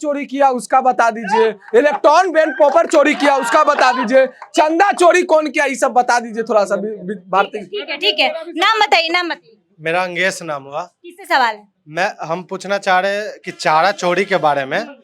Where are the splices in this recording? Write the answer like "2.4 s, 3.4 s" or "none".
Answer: none